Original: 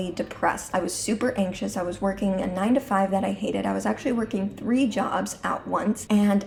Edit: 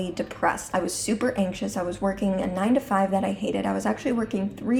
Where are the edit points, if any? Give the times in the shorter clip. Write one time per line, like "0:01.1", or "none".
none